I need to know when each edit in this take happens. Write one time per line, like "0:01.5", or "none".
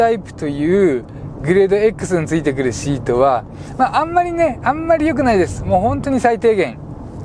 none